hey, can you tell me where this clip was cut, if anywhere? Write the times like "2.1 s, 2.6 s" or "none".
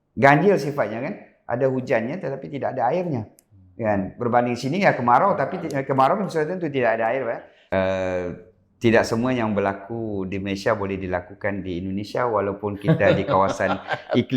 7.5 s